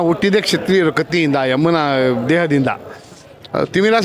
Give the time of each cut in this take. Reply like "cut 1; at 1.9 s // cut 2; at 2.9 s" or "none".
none